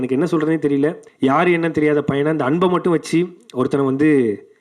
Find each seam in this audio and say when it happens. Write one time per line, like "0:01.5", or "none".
0:01.0

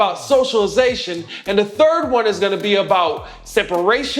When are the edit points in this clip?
none

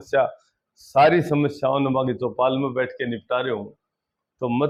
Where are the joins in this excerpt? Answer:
none

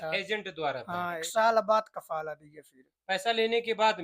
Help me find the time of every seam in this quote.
0:01.3

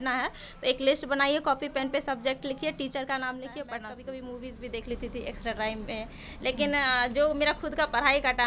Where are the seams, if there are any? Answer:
0:03.9

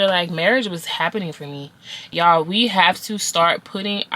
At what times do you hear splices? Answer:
0:02.0

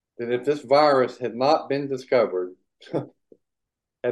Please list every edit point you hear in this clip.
none

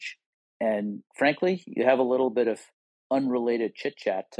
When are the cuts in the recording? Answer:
0:03.0

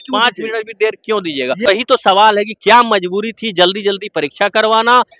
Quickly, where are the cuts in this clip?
0:01.7

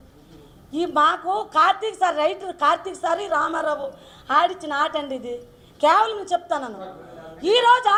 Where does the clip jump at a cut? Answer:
none

